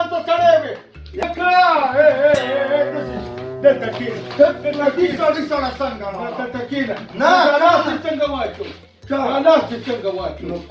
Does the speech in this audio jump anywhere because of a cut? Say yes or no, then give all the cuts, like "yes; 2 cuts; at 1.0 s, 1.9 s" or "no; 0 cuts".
yes; 1 cut; at 1.2 s